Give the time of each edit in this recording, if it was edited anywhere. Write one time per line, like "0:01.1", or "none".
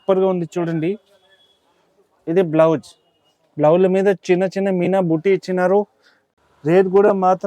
0:06.2

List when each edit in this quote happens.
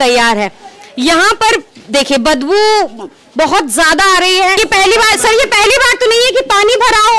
0:04.6

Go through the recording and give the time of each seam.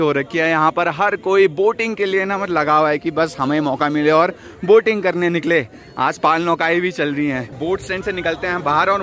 none

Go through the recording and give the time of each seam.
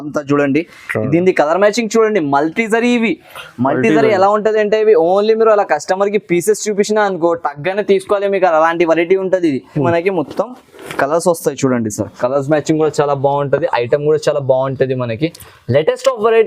0:09.8

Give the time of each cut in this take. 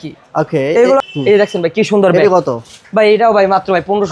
0:01.0

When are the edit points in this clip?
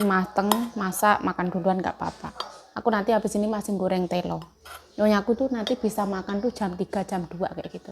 none

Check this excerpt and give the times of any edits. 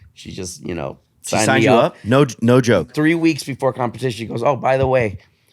0:02.8

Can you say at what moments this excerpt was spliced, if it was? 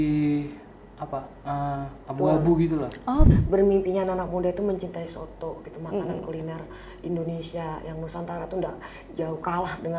0:03.3

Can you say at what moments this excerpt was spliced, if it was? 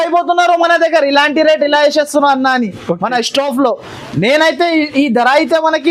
none

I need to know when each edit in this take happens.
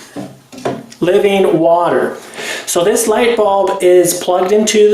none

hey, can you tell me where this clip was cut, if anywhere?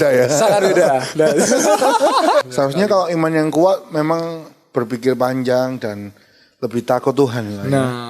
0:02.4

